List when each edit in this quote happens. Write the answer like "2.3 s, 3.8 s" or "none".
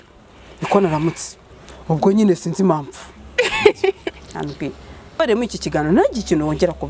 5.2 s